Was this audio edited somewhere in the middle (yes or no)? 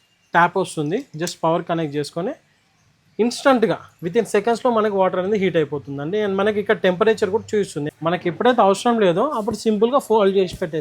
yes